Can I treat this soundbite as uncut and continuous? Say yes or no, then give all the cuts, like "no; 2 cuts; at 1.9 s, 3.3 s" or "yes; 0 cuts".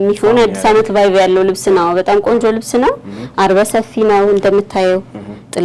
yes; 0 cuts